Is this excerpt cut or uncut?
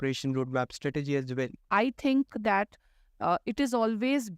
cut